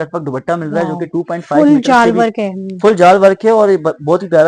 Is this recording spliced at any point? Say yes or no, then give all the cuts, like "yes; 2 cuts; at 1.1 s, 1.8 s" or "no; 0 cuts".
no; 0 cuts